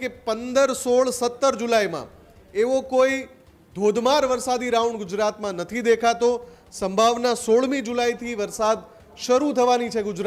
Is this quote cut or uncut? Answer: uncut